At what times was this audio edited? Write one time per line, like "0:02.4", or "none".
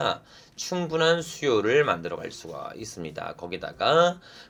none